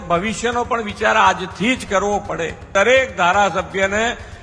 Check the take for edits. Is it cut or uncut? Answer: cut